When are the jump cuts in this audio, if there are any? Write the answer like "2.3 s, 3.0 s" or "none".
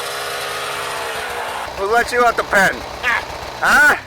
1.7 s